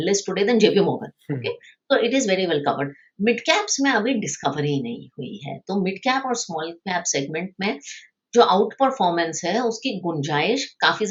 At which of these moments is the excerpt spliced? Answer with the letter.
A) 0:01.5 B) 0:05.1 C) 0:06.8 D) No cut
D